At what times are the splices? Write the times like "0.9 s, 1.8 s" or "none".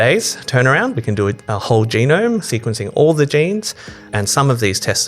2.5 s, 4.0 s